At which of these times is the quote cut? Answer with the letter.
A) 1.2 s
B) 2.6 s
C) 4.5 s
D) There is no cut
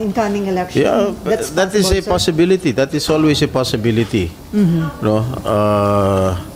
D